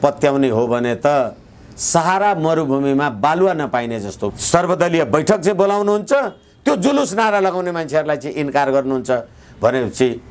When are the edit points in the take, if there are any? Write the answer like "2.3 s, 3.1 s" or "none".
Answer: 4.2 s